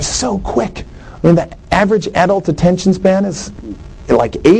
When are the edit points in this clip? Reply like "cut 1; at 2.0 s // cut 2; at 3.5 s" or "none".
none